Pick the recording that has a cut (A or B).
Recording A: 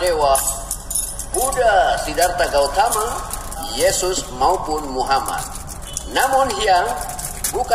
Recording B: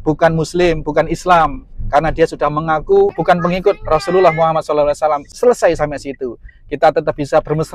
B